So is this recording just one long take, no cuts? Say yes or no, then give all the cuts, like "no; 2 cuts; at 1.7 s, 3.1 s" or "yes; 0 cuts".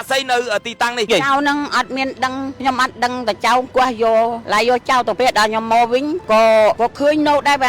no; 1 cut; at 1.1 s